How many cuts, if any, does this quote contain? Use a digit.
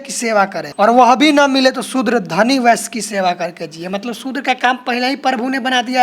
0